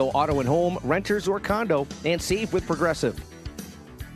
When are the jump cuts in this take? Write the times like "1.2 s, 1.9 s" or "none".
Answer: 3.1 s